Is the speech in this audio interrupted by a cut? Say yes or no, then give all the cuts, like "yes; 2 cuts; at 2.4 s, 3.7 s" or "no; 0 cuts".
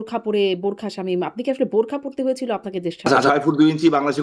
yes; 1 cut; at 3.1 s